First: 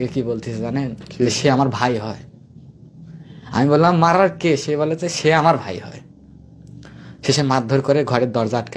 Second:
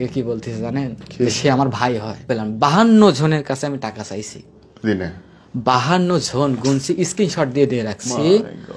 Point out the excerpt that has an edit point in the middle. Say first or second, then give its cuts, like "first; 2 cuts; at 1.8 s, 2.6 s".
second; 1 cut; at 2.3 s